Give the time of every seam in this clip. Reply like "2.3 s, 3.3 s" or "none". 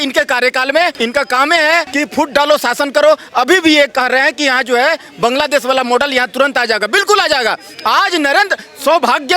0.9 s, 1.9 s